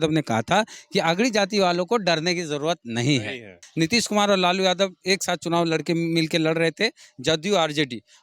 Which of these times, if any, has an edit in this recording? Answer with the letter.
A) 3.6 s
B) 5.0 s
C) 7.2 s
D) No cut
A